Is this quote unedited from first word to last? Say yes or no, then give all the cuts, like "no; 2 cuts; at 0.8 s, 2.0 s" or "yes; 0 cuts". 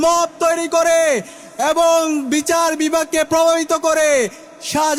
yes; 0 cuts